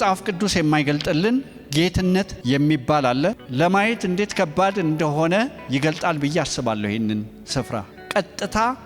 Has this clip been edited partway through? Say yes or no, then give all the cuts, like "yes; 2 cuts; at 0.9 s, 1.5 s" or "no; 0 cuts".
yes; 1 cut; at 3.4 s